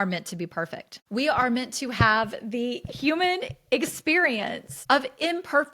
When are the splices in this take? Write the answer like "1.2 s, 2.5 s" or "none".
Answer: 0.9 s, 4.7 s